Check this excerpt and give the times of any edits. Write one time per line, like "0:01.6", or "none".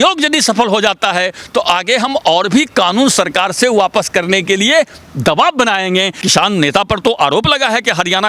0:06.2